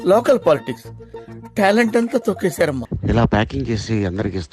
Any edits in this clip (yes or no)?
yes